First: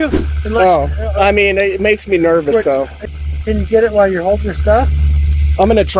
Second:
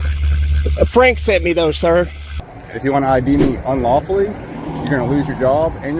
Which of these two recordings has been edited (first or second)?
second